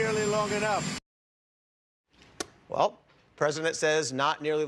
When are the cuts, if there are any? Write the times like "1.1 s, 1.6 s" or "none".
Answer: none